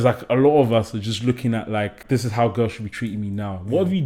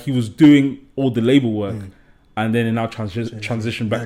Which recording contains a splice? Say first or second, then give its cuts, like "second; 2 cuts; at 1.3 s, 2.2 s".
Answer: first; 1 cut; at 2.0 s